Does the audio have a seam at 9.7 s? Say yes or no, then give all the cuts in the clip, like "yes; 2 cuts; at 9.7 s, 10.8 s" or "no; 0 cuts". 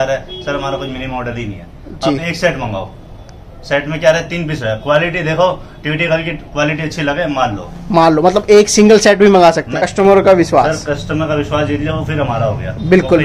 yes; 1 cut; at 9.7 s